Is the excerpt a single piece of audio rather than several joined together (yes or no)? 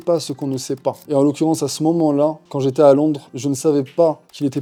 yes